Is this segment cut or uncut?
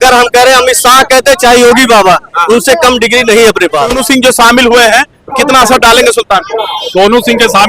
cut